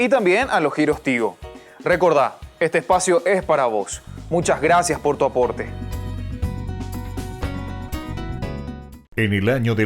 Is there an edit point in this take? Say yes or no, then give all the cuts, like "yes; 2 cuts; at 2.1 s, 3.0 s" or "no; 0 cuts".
yes; 1 cut; at 9.0 s